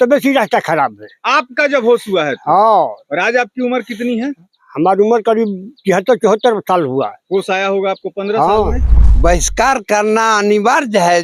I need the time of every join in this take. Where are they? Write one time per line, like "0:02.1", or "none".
0:08.8